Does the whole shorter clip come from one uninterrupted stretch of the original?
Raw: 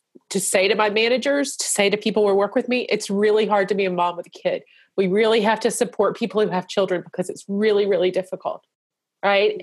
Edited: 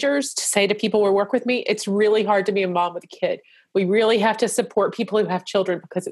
yes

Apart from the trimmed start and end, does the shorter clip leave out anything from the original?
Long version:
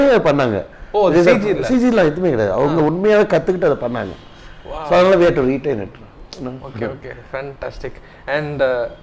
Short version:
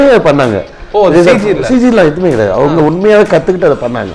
no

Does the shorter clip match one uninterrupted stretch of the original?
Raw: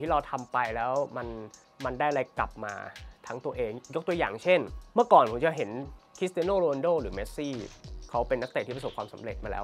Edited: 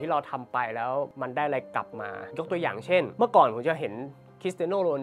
no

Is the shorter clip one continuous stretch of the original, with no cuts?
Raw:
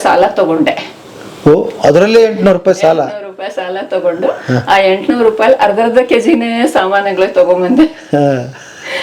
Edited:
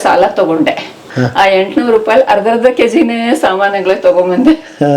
no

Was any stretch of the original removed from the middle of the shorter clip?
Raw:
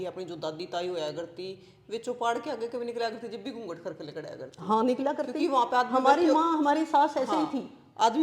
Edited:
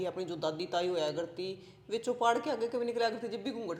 no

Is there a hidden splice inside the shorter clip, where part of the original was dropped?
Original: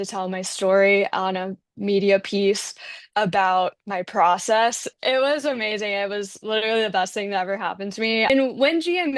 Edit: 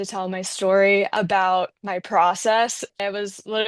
yes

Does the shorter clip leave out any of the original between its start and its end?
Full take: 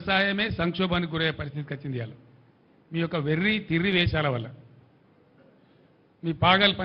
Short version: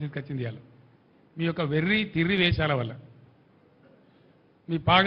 no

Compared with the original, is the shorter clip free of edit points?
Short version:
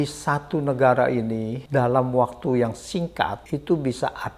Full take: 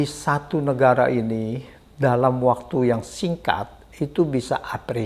no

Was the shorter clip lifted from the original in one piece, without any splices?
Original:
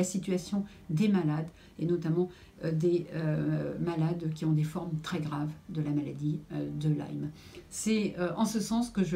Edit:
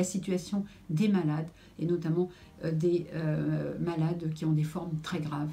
yes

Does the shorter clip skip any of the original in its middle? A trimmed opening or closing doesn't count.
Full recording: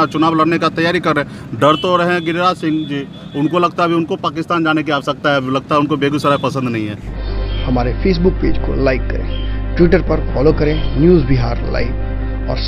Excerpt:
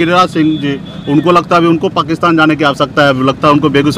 no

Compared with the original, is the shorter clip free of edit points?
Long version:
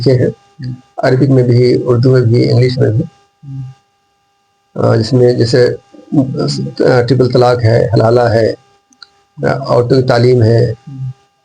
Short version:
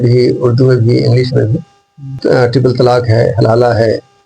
no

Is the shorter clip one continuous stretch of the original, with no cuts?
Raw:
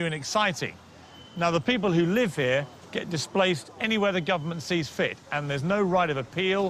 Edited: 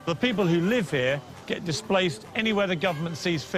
yes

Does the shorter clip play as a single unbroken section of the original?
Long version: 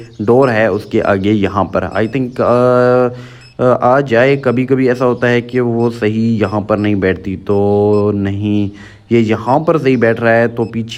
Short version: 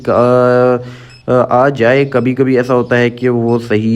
yes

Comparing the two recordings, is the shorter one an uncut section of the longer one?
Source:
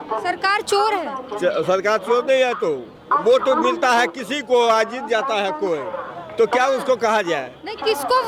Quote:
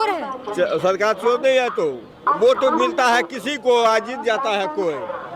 yes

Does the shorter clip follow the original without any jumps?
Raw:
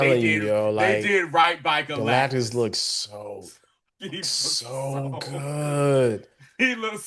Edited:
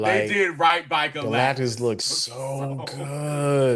no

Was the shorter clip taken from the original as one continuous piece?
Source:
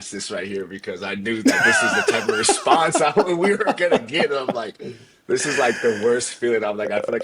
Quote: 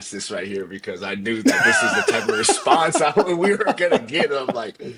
yes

